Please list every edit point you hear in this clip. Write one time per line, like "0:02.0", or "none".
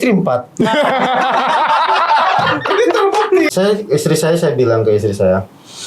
0:03.5